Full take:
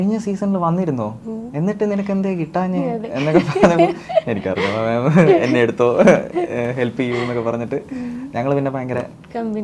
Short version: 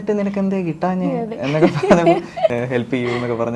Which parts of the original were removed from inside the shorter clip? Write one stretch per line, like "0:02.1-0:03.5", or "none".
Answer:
0:04.3-0:06.6